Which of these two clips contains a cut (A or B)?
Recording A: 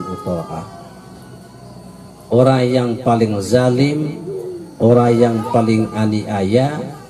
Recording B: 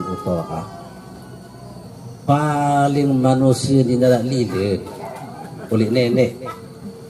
B